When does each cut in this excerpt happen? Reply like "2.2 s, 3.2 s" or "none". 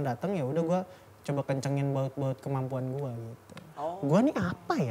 3.7 s